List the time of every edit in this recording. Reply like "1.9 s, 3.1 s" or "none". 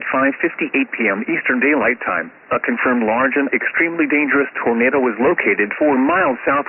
none